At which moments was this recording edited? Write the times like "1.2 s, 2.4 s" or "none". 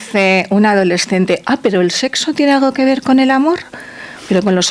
none